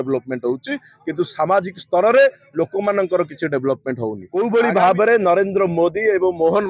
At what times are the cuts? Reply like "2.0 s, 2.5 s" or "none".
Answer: 4.2 s